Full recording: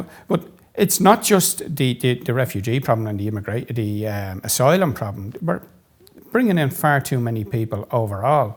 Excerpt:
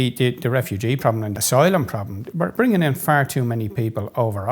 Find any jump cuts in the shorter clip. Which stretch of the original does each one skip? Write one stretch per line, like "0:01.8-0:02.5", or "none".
0:03.2-0:04.4
0:05.6-0:06.3